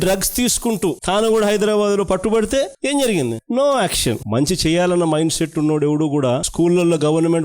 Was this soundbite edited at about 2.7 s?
no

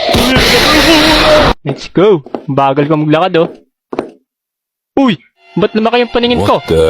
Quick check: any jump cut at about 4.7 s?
no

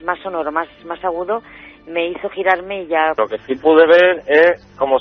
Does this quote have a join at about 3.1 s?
yes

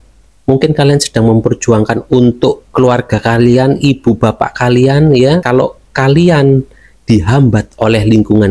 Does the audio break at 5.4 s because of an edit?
yes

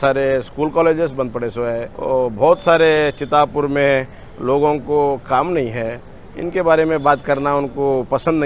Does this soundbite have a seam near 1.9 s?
yes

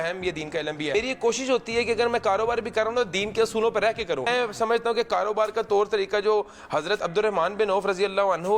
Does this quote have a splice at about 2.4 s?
no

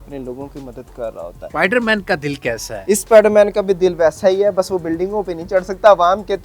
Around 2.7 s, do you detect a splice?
yes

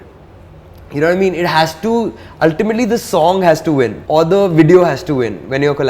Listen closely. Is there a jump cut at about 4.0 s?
yes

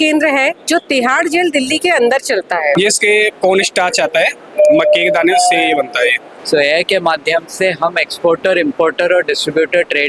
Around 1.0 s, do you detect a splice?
no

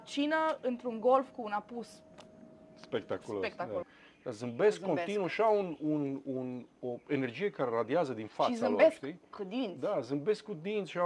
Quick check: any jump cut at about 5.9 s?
no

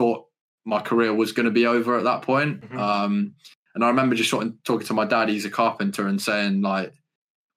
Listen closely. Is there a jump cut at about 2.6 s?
no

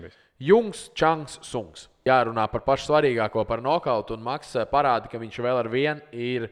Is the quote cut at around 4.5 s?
no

